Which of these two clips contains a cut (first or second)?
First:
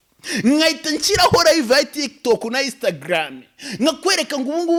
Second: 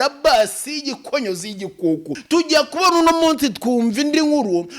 second